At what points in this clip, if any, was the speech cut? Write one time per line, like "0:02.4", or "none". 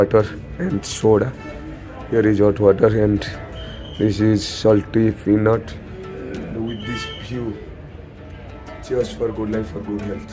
none